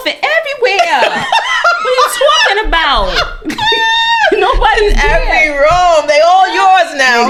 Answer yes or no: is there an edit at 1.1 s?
no